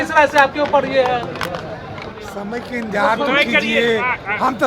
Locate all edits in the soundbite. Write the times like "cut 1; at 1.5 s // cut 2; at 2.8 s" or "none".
none